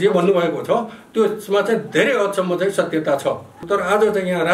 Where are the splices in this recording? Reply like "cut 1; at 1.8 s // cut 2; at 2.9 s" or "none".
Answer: cut 1; at 3.6 s